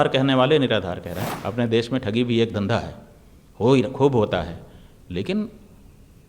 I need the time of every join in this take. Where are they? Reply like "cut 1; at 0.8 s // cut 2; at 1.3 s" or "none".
cut 1; at 1.2 s